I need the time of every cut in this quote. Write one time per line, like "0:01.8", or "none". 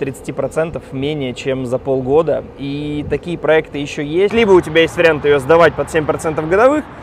0:04.3